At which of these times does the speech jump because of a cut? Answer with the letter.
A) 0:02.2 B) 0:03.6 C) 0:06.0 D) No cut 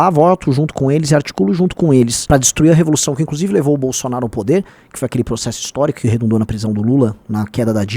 A